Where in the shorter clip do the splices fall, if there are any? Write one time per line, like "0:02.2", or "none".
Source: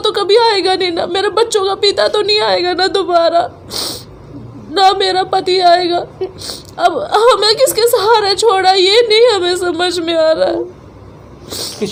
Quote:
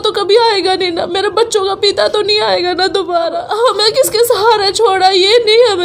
0:03.4